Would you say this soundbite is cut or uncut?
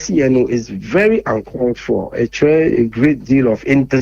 uncut